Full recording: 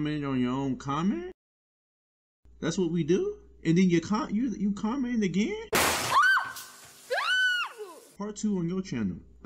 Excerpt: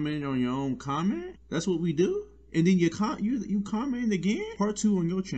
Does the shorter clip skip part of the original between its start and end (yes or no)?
yes